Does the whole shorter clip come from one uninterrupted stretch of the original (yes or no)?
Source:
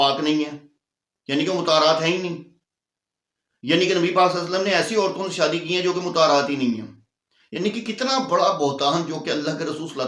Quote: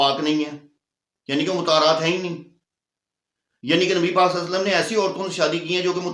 yes